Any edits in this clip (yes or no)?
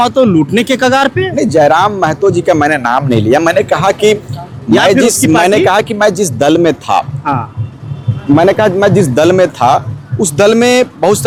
no